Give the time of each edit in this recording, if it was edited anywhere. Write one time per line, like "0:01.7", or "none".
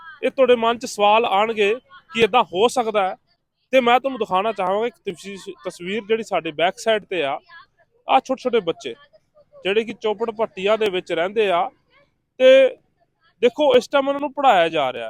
none